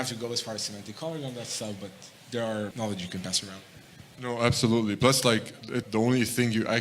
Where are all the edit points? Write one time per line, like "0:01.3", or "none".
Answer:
0:02.7
0:05.9